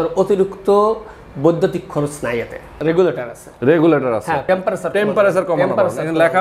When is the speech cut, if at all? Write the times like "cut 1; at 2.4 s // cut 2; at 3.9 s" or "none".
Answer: cut 1; at 2.8 s